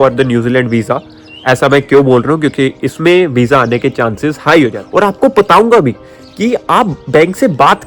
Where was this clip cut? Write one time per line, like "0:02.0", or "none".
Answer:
0:04.8